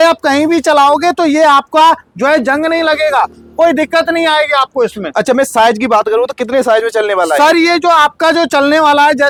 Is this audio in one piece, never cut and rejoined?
yes; 0 cuts

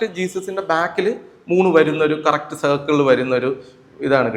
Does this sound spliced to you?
no; 0 cuts

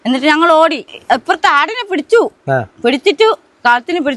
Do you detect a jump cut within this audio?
yes; 1 cut; at 0.9 s

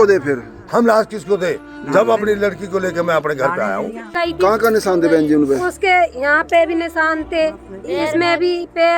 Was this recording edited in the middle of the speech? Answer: yes; 1 cut; at 4.1 s

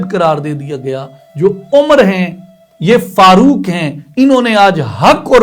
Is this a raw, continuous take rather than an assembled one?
no; 1 cut; at 1.2 s

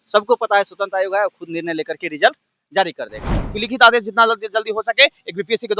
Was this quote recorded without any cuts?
no; 1 cut; at 3.5 s

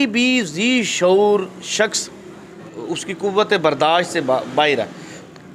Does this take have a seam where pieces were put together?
yes; 1 cut; at 2.7 s

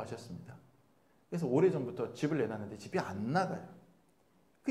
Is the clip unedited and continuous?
yes; 0 cuts

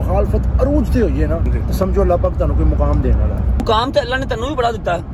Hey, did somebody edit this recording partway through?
yes; 2 cuts; at 1.5 s, 3.6 s

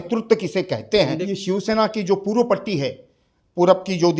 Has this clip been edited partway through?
yes; 1 cut; at 1.2 s

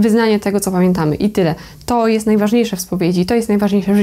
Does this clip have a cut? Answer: no; 0 cuts

